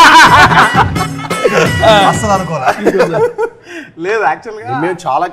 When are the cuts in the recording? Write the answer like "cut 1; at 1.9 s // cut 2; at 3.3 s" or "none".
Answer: none